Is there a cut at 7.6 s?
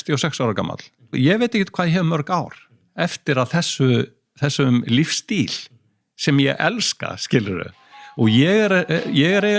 no; 1 cut; at 1.1 s

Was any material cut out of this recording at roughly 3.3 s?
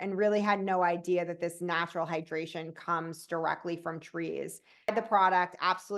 no; 1 cut; at 4.9 s

